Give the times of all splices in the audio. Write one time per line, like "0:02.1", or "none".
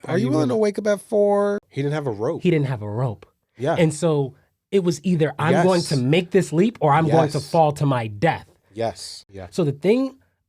0:01.7
0:09.1